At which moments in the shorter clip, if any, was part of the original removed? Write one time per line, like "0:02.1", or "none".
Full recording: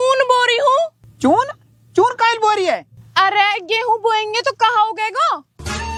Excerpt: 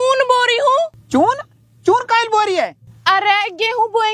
0:01.0